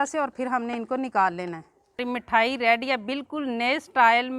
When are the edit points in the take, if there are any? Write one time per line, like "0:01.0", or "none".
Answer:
0:02.0